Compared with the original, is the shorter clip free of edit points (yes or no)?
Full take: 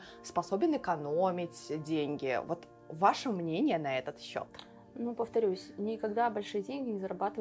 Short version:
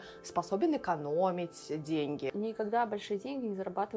no